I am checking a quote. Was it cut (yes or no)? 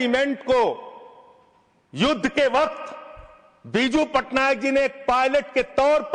no